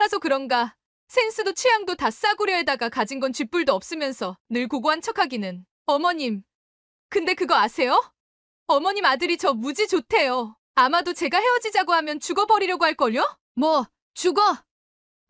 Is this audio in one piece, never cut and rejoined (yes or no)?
yes